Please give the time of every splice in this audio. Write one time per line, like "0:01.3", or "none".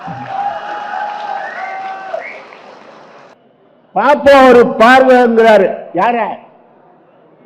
0:03.3